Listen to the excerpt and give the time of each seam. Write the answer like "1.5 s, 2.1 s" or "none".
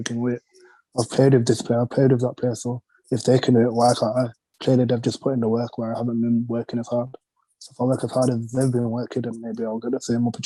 none